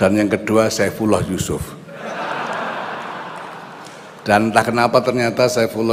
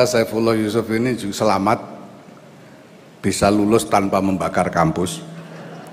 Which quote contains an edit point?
first; 1 cut; at 4.1 s

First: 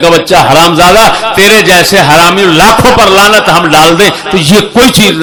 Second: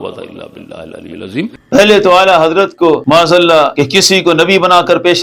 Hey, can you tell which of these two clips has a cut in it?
second; 3 cuts; at 1.5 s, 3.0 s, 3.7 s

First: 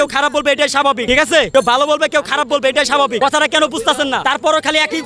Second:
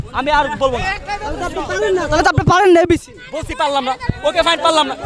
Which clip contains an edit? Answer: first; 3 cuts; at 1.3 s, 3.1 s, 4.2 s

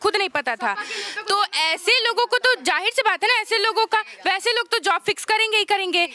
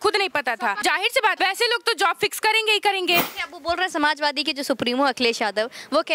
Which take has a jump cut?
second; 2 cuts; at 1.2 s, 3.4 s

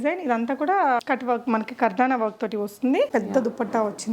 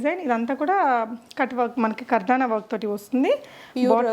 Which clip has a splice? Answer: first; 2 cuts; at 1.0 s, 3.1 s

